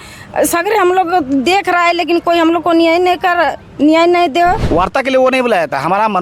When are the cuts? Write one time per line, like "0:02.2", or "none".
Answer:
0:04.6

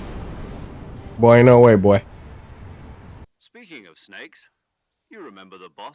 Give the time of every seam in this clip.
0:03.3

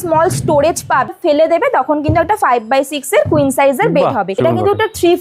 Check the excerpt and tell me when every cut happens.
0:01.1
0:04.3

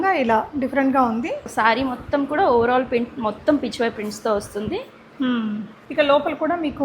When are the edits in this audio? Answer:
0:01.5
0:05.7

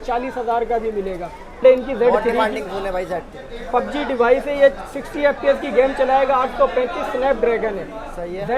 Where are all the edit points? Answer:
0:01.6

